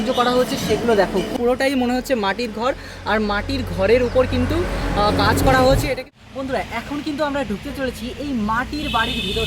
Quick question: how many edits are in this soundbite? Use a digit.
2